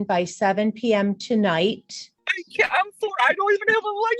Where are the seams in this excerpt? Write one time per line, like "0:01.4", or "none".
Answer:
none